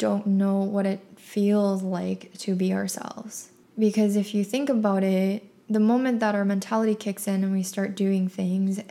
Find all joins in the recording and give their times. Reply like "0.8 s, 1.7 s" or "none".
none